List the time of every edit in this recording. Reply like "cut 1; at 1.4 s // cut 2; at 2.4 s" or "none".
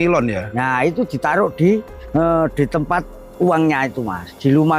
cut 1; at 2.0 s